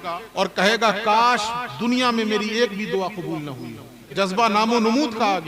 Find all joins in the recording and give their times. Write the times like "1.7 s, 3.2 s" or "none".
4.1 s